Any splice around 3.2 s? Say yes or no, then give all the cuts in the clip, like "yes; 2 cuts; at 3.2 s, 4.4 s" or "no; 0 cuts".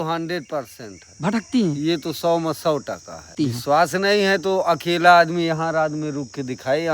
yes; 1 cut; at 3.2 s